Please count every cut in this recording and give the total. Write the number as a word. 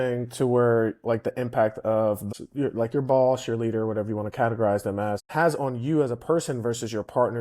two